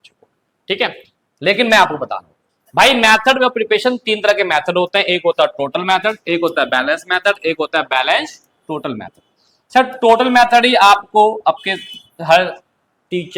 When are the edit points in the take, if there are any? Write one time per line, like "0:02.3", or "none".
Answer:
none